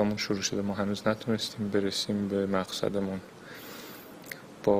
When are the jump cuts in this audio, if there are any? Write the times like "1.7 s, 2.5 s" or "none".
none